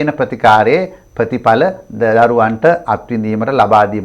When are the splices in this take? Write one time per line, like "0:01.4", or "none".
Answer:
none